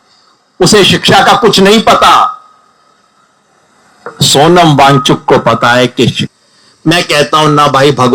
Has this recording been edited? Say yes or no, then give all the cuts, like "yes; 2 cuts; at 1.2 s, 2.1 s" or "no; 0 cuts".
yes; 1 cut; at 6.2 s